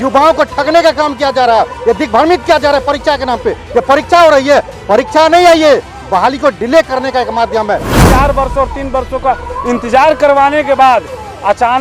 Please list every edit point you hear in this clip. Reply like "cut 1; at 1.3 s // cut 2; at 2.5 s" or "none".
cut 1; at 8.0 s